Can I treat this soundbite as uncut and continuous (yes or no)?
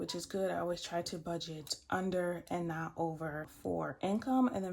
no